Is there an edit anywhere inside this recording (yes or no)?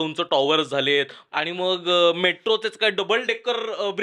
yes